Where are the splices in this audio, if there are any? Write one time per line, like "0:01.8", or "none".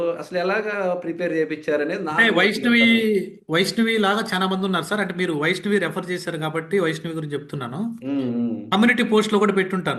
none